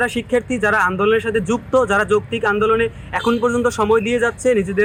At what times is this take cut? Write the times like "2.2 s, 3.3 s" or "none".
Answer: none